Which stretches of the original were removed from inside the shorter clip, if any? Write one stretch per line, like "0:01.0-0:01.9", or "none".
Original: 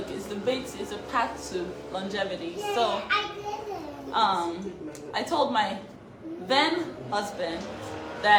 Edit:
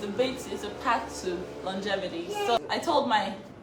0:02.9-0:05.0

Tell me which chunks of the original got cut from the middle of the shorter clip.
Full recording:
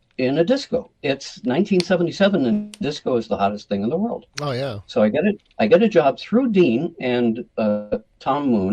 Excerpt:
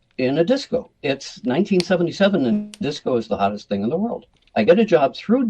0:04.4-0:05.4

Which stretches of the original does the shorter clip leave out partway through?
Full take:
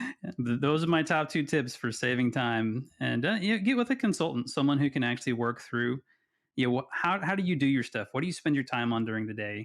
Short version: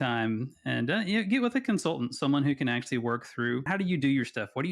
0:06.0-0:07.2

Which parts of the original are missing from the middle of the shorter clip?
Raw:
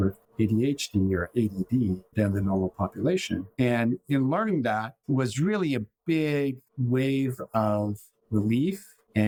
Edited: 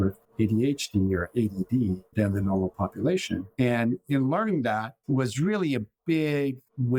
none

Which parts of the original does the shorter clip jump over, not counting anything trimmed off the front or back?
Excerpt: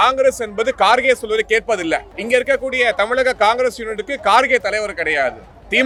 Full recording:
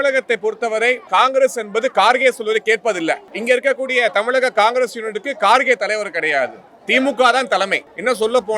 none

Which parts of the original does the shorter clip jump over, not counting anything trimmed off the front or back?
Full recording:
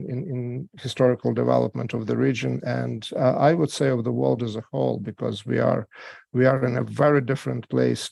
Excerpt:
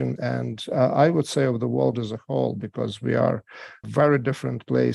0:06.3-0:06.8

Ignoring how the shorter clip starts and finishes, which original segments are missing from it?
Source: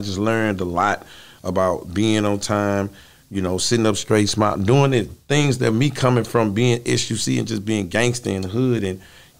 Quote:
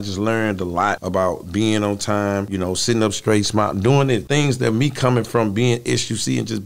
0:01.0-0:01.4
0:02.9-0:03.3
0:05.1-0:05.2

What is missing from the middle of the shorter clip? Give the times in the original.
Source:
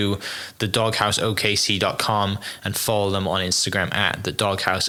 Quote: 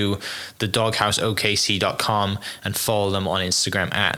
none

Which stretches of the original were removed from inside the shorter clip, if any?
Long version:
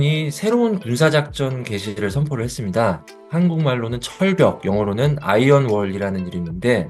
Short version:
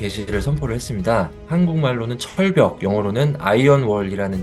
0:03.1-0:03.2

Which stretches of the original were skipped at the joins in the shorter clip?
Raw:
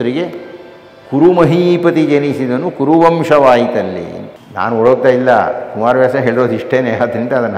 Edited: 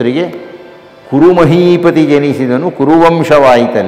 none

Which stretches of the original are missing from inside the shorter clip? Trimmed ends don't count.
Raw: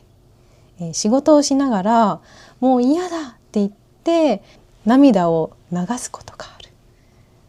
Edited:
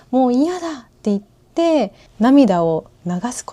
0:04.5-0:04.7

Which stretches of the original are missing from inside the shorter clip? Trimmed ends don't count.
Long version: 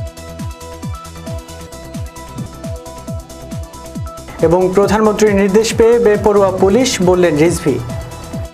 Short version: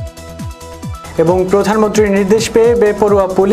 0:01.1-0:04.4

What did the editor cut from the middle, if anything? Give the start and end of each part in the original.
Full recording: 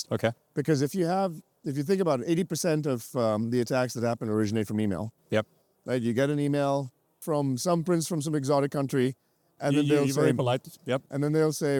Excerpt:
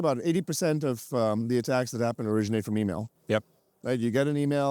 none

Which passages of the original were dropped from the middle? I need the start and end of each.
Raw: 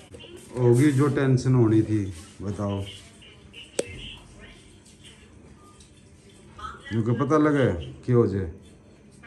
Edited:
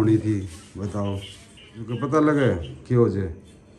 0:03.6-0:07.1

